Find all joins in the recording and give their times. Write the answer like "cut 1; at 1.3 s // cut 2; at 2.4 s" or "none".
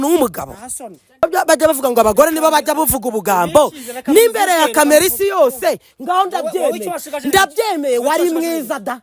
cut 1; at 1.2 s